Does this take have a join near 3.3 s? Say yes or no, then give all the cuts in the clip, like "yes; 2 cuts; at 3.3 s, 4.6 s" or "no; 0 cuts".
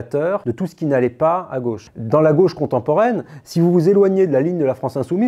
no; 1 cut; at 1.8 s